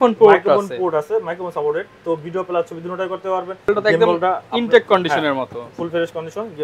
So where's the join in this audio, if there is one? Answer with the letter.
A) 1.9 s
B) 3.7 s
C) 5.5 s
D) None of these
B